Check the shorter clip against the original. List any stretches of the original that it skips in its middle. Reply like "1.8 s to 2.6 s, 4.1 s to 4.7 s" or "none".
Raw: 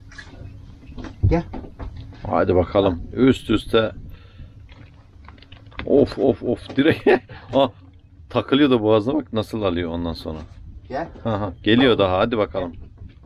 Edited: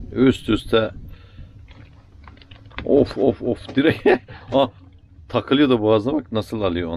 none

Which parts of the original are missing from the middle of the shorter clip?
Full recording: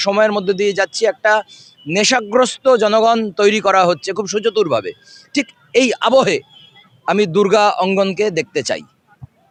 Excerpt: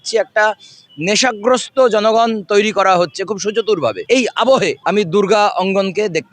4.9 s to 5.6 s, 6.4 s to 7.0 s

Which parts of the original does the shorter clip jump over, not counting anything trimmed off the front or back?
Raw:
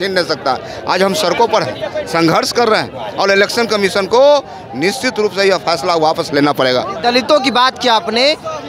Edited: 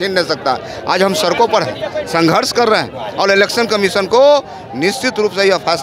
none

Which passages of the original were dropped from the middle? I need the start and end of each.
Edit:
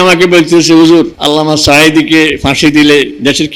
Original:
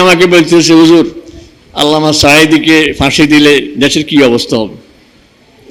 1.2 s to 1.7 s

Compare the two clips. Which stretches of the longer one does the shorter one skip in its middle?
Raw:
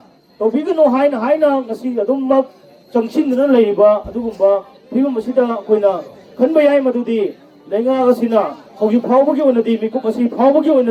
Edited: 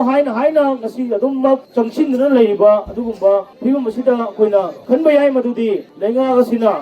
2.5 s to 2.8 s, 4.7 s to 4.8 s, 6.1 s to 6.3 s, 7.4 s to 7.6 s

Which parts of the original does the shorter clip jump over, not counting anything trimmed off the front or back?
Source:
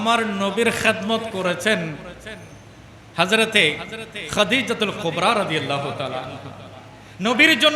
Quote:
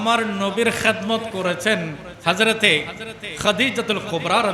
2.1 s to 3.0 s

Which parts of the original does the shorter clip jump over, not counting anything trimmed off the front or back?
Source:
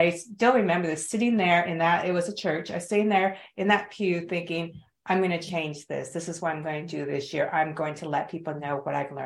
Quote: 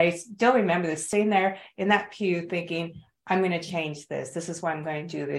1.0 s to 2.8 s

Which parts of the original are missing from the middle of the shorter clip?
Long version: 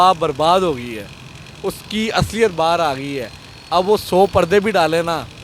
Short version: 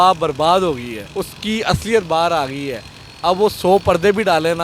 1.0 s to 1.4 s

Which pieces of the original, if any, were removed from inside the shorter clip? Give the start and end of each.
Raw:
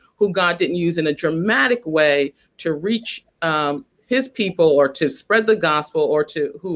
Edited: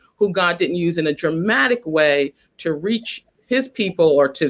3.3 s to 3.9 s

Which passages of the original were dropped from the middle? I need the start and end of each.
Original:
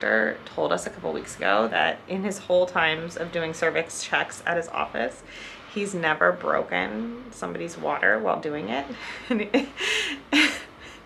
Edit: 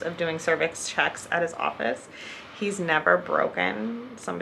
none

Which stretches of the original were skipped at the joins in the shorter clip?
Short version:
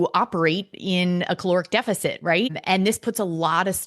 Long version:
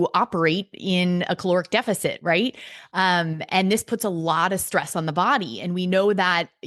2.6 s to 3.4 s

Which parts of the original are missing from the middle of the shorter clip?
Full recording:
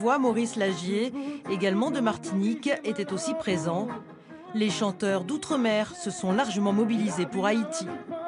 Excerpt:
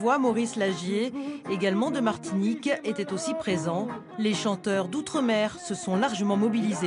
4.0 s to 4.4 s

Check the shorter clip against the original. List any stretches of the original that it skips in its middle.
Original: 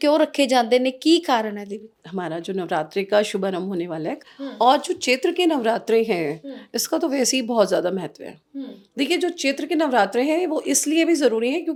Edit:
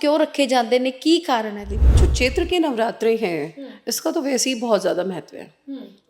2.0 s to 4.8 s

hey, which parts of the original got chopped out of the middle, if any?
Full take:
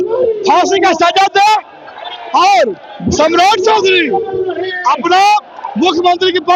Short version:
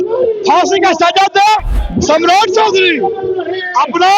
1.8 s to 2.9 s

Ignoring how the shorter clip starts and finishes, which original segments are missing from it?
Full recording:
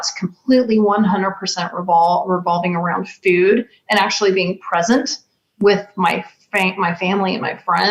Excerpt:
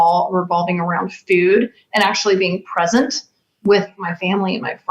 5.9 s to 6.7 s

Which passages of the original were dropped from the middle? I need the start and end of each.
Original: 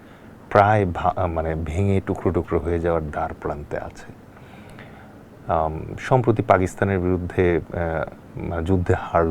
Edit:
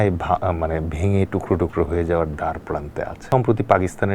3.9 s to 6.0 s

